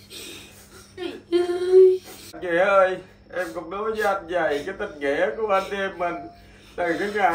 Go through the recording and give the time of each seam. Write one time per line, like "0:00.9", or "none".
0:02.3